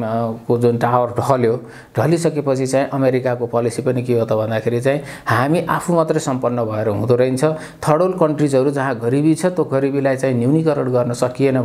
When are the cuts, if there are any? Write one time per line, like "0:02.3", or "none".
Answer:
none